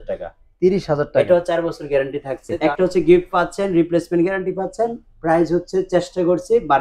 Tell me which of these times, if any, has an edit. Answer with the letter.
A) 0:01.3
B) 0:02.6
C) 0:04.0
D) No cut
B